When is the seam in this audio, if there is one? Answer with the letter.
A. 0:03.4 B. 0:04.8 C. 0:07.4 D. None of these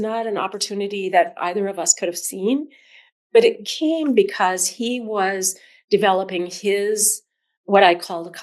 D